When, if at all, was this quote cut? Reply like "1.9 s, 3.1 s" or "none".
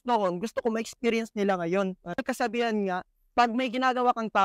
2.2 s